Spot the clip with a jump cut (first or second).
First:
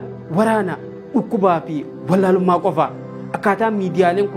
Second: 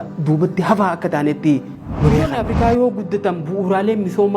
second